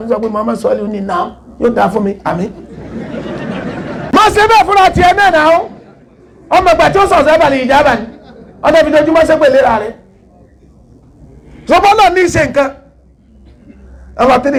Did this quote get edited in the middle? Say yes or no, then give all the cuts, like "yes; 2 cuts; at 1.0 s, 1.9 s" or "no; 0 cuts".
no; 0 cuts